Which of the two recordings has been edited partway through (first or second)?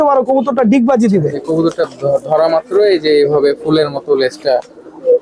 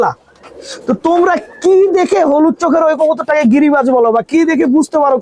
first